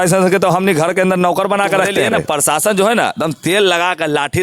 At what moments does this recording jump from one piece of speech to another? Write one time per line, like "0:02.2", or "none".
0:02.2